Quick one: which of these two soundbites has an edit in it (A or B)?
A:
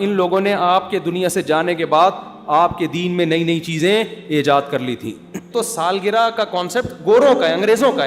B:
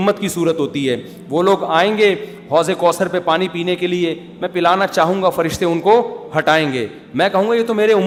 A